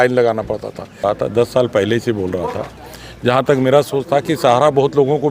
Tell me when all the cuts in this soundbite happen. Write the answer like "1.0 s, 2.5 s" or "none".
1.0 s